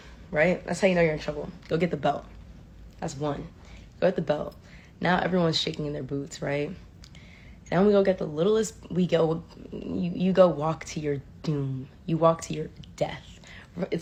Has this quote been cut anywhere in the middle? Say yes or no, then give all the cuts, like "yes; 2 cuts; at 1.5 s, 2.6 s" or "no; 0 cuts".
no; 0 cuts